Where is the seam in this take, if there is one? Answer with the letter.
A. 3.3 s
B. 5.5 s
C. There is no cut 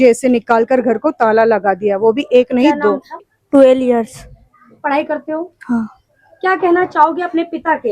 A